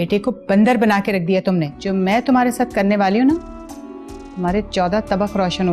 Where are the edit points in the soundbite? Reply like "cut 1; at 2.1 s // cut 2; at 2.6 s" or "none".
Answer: cut 1; at 1.8 s